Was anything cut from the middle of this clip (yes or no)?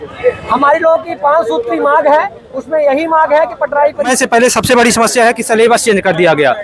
yes